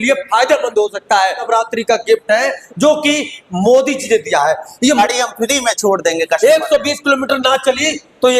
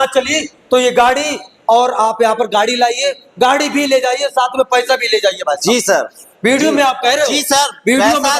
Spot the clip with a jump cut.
first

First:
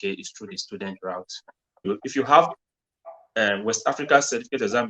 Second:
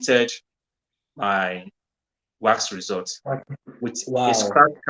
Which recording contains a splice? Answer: first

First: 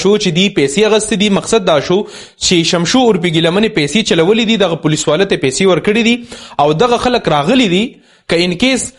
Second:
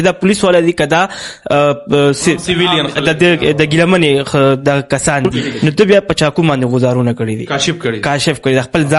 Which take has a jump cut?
second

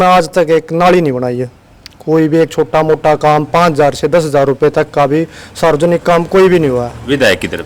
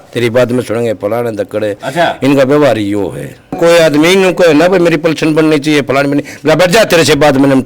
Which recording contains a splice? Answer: second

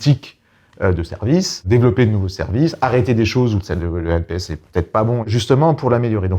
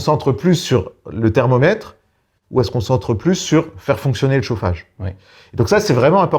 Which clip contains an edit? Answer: first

